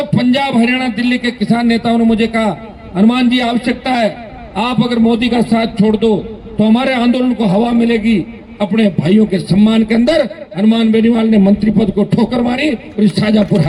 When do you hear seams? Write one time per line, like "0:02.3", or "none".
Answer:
none

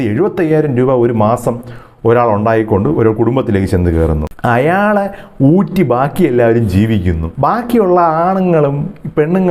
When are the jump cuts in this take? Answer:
none

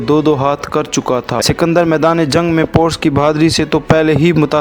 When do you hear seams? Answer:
0:01.4

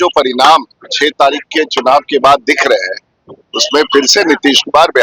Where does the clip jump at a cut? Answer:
none

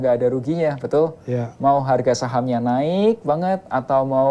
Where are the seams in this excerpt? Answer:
none

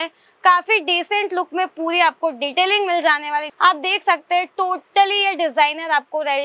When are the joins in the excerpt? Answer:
0:03.5

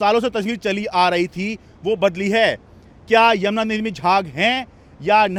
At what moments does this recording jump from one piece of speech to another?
none

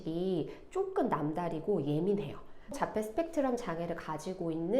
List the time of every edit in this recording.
0:02.8

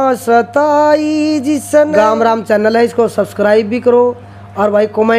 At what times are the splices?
0:01.9

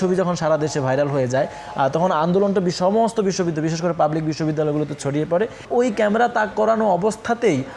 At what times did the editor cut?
0:05.6

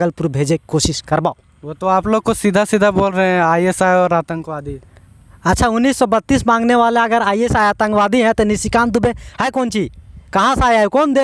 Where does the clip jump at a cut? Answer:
none

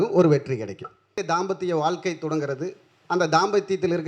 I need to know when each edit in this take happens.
0:01.2

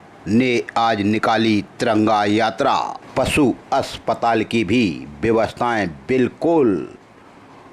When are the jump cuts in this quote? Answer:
0:03.0

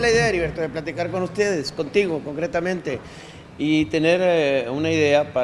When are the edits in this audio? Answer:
none

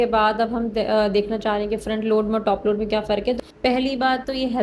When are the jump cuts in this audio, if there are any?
0:03.3

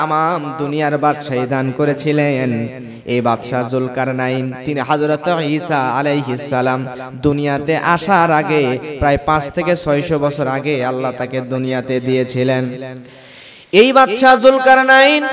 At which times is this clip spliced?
none

